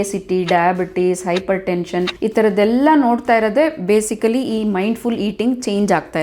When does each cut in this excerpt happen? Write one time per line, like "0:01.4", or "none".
0:02.1

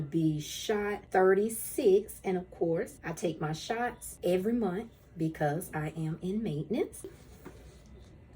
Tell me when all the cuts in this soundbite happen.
0:01.0
0:03.0
0:04.1
0:07.3

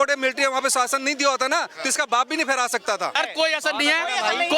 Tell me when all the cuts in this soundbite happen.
0:03.2

